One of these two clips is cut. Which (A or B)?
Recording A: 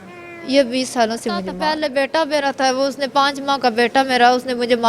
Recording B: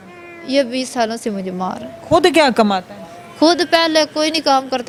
A